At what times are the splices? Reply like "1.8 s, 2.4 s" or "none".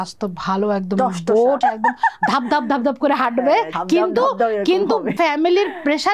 1.6 s, 3.8 s, 5.1 s